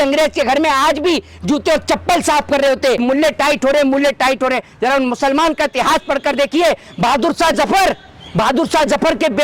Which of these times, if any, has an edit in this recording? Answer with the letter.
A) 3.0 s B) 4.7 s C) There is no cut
A